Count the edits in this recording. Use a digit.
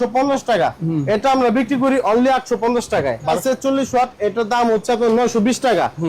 1